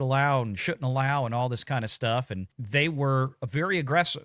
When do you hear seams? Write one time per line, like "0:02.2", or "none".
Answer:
none

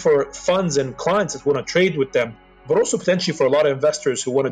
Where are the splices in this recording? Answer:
none

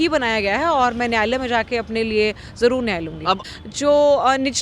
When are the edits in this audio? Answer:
0:03.4

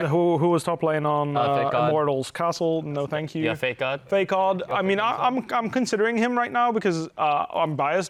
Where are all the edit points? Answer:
none

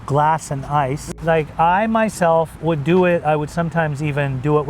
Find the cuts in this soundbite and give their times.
0:01.0

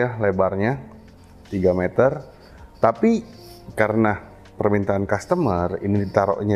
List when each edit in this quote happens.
none

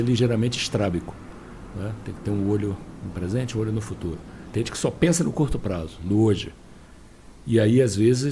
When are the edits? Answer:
none

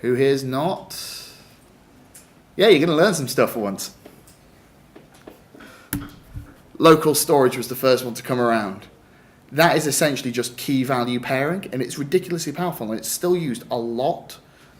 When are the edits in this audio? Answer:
0:07.0

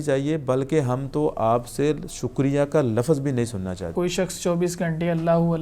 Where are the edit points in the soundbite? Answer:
0:03.8

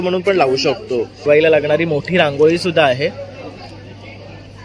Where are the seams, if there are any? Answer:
0:01.2

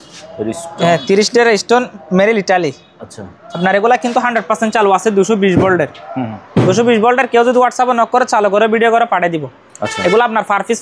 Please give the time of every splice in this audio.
none

